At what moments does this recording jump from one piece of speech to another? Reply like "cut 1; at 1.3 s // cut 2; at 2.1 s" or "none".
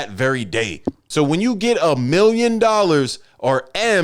none